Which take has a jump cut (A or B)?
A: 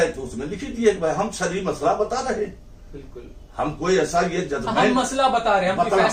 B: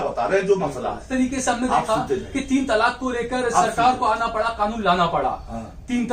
B